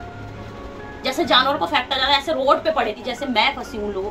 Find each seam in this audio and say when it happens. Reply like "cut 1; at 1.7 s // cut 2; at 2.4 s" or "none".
cut 1; at 3.0 s